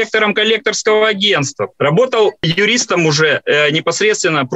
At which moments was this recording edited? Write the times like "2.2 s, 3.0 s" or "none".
1.7 s, 2.4 s